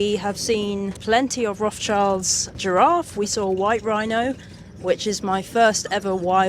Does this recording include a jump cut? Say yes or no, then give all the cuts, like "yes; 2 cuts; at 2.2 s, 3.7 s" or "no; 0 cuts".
yes; 2 cuts; at 1.0 s, 2.6 s